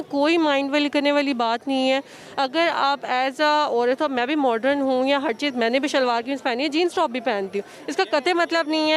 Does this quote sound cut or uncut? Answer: uncut